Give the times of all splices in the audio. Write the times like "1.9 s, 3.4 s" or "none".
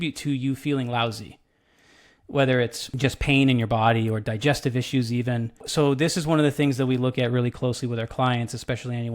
2.8 s, 5.6 s